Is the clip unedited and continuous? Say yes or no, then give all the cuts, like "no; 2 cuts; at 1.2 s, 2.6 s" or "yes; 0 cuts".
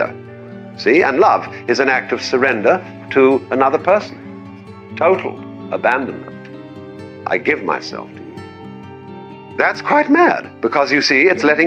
yes; 0 cuts